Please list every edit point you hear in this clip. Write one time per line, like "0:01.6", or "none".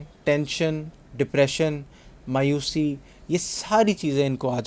none